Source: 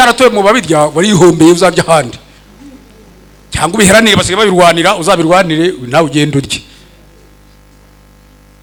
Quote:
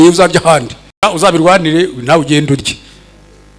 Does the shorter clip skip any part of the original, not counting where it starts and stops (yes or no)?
yes